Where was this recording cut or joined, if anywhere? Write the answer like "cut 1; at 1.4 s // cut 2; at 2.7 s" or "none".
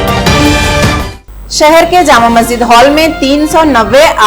cut 1; at 1.2 s